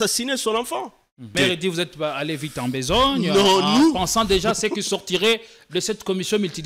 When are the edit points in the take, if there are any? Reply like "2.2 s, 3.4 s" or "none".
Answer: 1.3 s